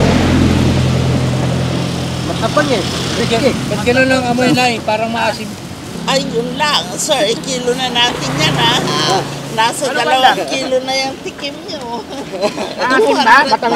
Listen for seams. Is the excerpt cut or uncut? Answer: cut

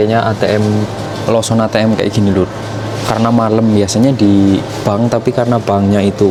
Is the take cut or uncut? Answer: uncut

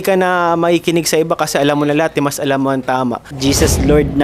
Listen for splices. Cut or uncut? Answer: cut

